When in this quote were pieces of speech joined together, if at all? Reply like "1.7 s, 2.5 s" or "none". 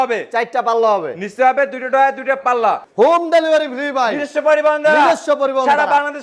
2.8 s

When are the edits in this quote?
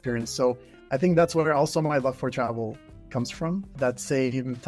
3.7 s

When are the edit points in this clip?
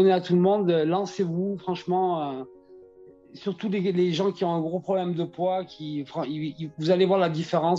none

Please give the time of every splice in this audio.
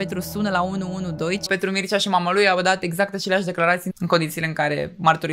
1.5 s, 3.9 s

